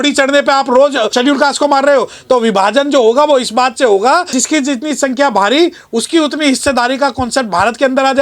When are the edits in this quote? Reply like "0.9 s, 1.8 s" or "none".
1.1 s, 4.3 s